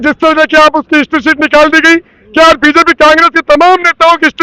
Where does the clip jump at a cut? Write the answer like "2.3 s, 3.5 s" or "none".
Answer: none